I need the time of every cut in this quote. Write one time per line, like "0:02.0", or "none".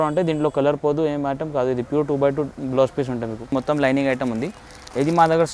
0:03.5